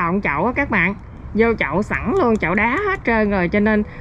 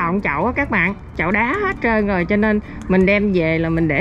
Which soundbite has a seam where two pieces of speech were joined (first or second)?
second